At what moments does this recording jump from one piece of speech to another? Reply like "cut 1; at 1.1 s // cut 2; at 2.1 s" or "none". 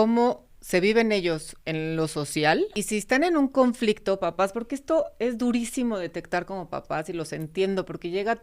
cut 1; at 1.5 s // cut 2; at 2.8 s